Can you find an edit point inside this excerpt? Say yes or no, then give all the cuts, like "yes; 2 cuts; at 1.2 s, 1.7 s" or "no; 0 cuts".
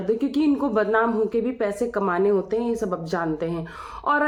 no; 0 cuts